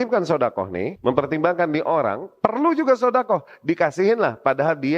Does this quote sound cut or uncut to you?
cut